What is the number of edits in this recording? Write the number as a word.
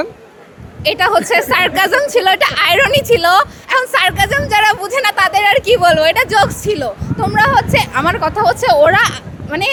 zero